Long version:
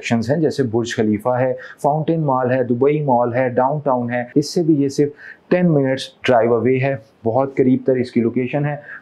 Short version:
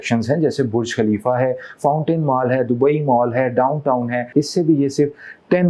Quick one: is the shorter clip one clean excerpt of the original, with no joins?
yes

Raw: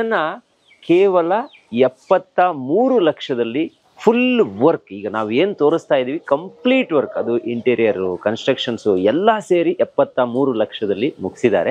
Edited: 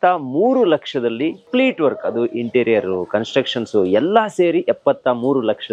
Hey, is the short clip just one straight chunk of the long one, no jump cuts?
no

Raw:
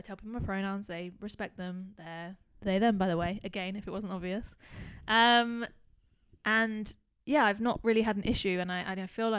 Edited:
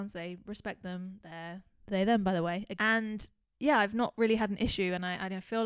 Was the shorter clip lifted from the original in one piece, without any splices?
no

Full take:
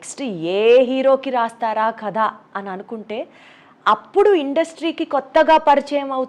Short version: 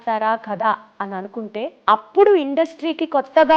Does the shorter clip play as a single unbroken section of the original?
no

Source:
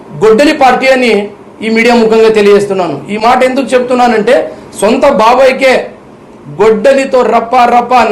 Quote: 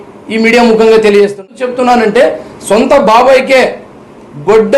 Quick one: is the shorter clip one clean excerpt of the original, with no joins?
no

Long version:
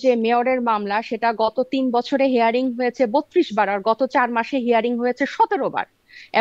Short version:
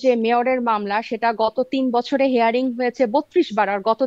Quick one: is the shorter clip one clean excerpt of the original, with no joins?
yes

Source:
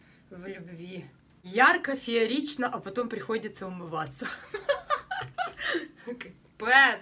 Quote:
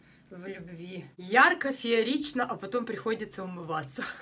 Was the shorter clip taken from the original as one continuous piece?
no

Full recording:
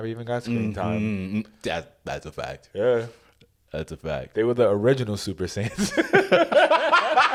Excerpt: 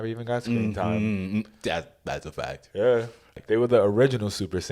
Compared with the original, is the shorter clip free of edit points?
no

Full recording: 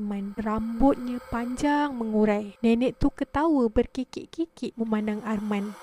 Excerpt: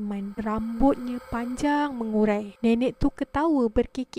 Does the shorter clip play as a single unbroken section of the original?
yes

